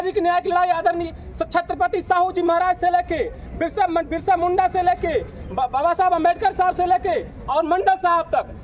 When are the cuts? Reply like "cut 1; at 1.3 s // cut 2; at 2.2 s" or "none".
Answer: none

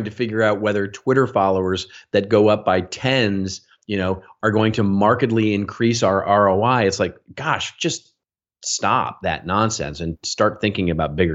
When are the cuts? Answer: none

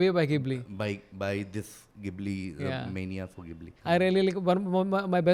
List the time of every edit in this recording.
cut 1; at 3.7 s

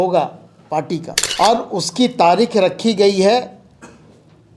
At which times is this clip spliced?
cut 1; at 1.2 s

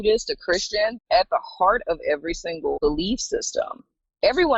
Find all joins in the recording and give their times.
cut 1; at 1.0 s // cut 2; at 2.8 s

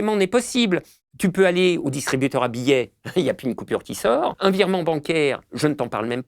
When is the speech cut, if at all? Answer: cut 1; at 4.4 s

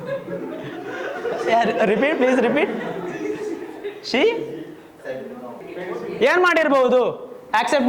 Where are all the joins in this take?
cut 1; at 5.6 s

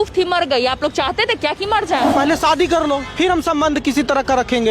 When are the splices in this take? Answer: cut 1; at 2.1 s

